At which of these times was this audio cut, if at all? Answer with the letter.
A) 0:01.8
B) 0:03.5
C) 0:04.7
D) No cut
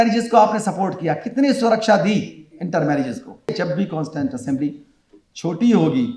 B